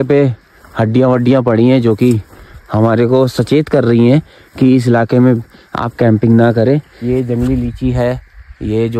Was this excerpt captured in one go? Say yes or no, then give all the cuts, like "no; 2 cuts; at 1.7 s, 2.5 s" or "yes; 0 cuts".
no; 1 cut; at 6.9 s